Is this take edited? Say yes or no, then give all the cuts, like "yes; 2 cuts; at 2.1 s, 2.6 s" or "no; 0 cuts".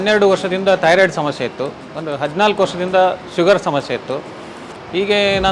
no; 0 cuts